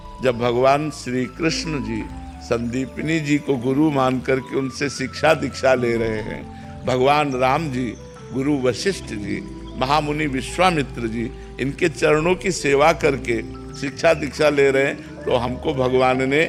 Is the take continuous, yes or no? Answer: yes